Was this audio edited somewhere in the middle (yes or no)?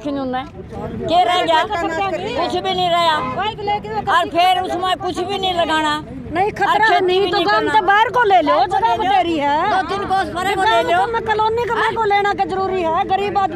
no